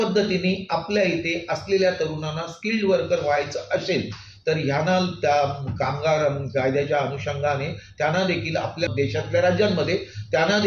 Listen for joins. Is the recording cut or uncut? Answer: cut